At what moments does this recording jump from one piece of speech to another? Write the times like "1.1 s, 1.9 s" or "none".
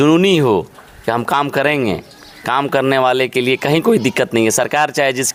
none